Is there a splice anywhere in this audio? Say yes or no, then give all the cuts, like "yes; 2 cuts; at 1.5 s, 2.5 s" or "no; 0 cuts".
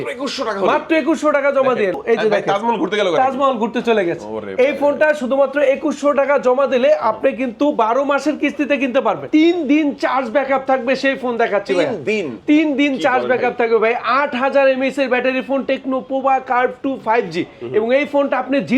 yes; 2 cuts; at 1.9 s, 9.2 s